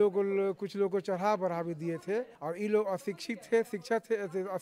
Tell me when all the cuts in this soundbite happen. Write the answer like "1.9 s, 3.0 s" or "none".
2.4 s